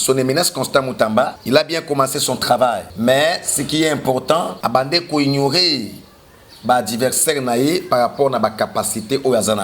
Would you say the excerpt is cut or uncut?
cut